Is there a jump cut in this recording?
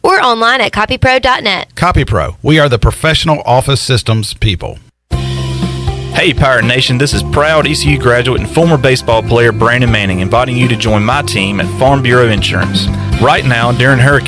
yes; 1 cut; at 4.9 s

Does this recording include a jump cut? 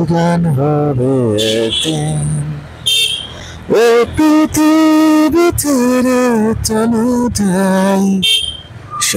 no; 0 cuts

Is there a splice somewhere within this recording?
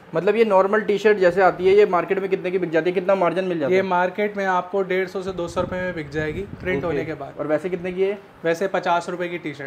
no; 0 cuts

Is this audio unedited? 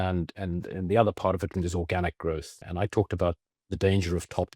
no; 1 cut; at 1.5 s

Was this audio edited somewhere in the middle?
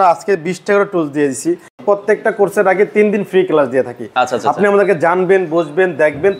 yes; 1 cut; at 1.8 s

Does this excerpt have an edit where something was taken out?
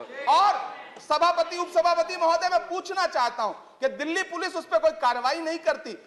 no; 0 cuts

